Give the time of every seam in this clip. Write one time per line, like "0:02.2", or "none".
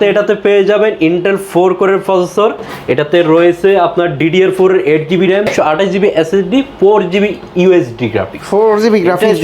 none